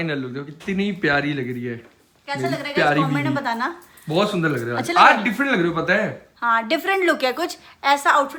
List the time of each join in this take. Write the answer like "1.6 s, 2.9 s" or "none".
none